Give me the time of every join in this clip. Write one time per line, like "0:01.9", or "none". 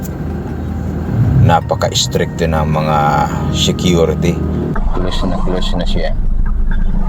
0:04.7

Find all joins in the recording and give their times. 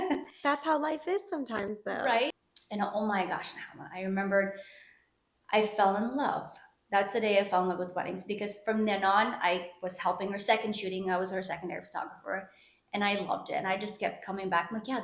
0:02.3

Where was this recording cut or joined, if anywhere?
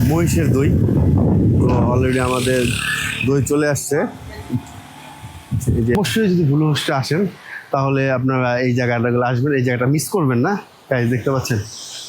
0:05.9

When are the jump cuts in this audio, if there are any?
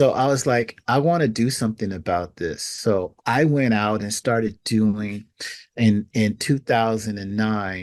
none

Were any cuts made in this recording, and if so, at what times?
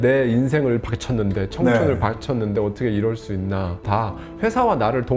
0:03.8

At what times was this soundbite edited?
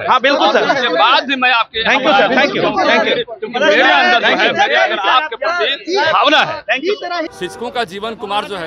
0:07.3

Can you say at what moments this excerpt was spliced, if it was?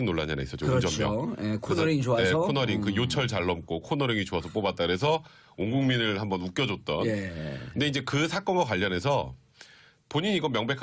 0:02.4

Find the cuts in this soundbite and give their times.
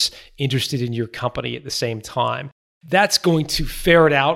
none

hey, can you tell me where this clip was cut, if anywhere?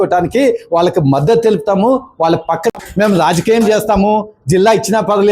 0:02.7

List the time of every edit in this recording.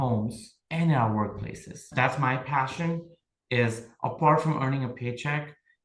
0:01.9

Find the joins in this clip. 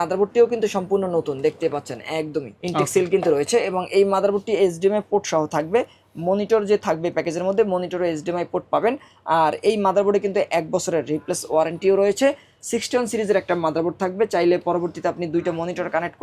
none

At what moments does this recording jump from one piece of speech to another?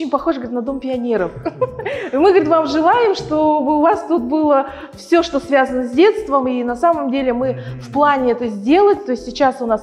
none

